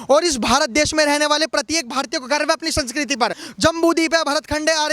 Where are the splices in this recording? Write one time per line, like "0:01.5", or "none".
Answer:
0:03.4